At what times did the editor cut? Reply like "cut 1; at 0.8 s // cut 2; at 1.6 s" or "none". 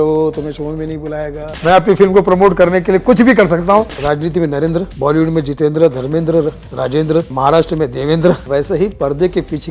cut 1; at 1.5 s // cut 2; at 4.0 s // cut 3; at 4.9 s // cut 4; at 7.3 s // cut 5; at 8.4 s

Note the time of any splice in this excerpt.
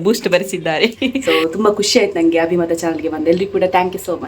cut 1; at 1.1 s

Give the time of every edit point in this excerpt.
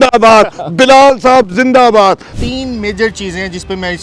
cut 1; at 2.3 s

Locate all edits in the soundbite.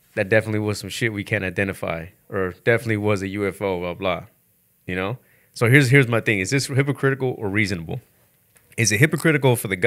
none

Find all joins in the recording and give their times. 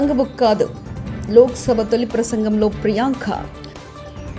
cut 1; at 3.4 s

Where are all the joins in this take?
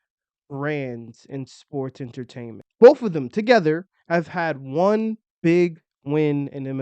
cut 1; at 2.6 s

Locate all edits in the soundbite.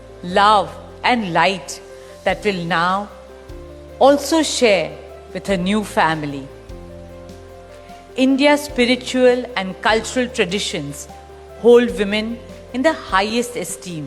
cut 1; at 6.7 s // cut 2; at 8.2 s

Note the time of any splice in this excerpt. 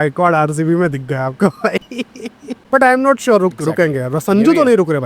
cut 1; at 2.5 s

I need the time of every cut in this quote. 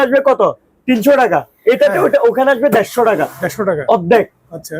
none

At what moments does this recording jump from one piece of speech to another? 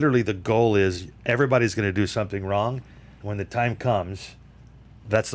none

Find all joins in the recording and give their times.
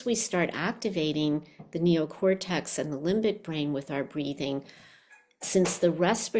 none

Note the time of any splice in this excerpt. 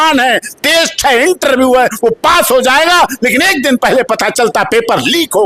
none

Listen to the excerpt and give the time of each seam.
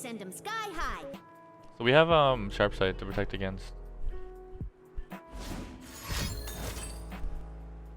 cut 1; at 1.1 s

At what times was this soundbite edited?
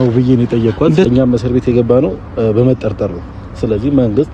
cut 1; at 1.0 s

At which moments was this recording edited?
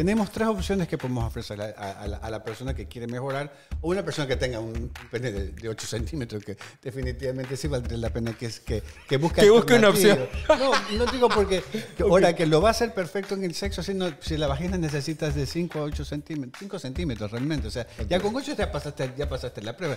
none

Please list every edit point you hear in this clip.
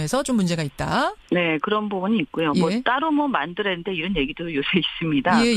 none

